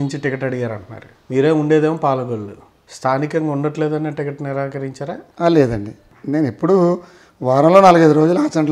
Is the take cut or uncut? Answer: uncut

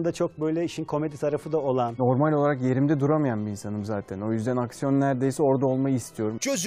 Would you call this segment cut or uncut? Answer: cut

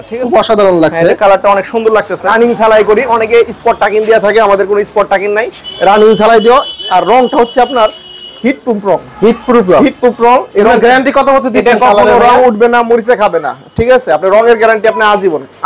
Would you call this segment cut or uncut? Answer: cut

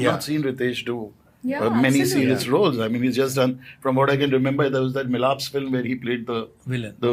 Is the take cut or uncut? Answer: uncut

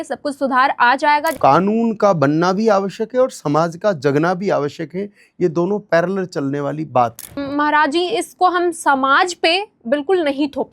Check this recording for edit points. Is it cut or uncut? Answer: cut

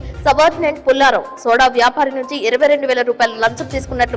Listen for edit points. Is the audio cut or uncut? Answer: uncut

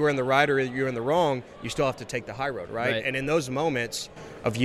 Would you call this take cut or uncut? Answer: uncut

